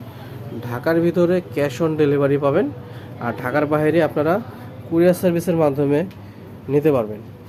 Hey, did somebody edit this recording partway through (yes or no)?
no